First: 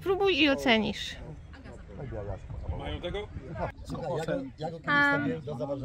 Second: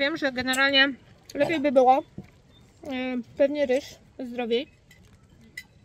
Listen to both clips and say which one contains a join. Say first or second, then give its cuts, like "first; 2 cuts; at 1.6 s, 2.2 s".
first; 1 cut; at 3.8 s